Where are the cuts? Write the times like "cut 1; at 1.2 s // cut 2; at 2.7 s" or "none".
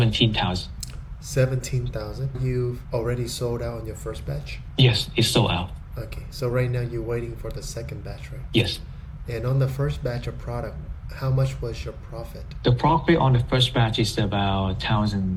none